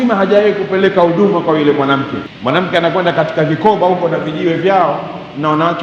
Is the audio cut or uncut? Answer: cut